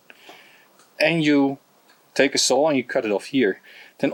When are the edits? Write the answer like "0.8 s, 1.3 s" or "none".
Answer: none